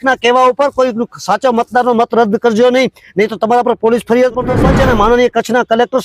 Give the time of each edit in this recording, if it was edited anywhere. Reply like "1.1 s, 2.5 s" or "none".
4.6 s